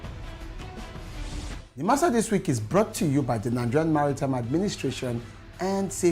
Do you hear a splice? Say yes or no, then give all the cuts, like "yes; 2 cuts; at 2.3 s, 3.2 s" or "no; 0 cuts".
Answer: yes; 1 cut; at 1.1 s